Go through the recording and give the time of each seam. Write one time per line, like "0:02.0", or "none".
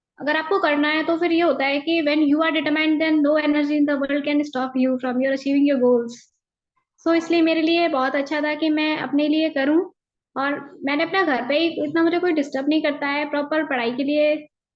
none